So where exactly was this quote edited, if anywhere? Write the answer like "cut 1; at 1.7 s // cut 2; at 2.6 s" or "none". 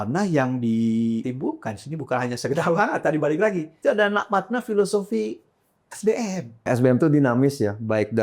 cut 1; at 1.2 s // cut 2; at 3.7 s // cut 3; at 6.7 s